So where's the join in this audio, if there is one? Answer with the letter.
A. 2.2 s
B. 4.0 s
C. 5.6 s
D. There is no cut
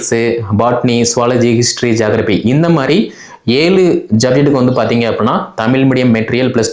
D